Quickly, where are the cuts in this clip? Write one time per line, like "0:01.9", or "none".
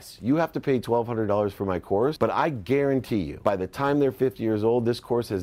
0:02.2
0:03.3